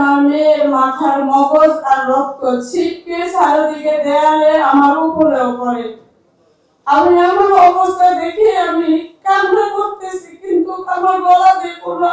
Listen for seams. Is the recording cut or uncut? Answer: uncut